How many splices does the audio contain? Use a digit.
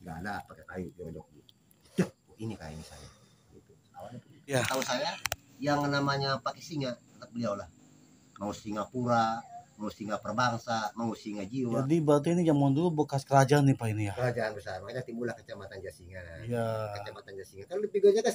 2